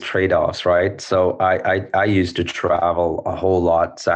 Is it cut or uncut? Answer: uncut